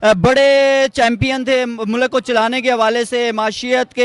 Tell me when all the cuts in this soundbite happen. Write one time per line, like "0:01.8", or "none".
none